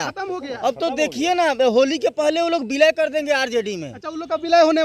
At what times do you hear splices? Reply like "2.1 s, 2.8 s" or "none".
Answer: none